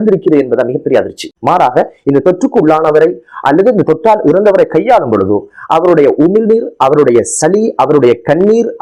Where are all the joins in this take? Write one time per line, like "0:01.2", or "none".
0:01.2